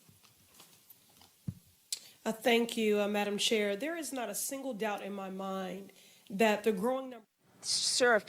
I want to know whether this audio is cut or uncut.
cut